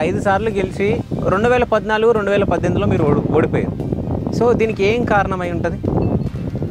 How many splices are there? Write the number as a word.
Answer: one